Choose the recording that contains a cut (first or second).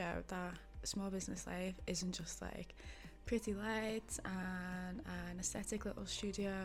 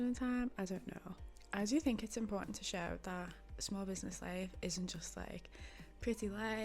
second